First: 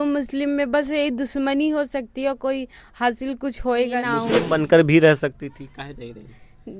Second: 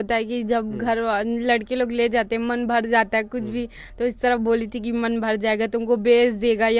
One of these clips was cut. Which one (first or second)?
first